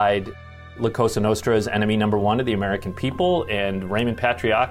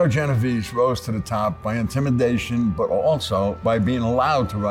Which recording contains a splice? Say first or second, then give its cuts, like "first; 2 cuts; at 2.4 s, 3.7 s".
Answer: second; 1 cut; at 3.6 s